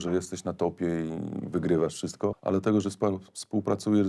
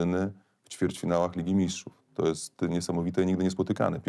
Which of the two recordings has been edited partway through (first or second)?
first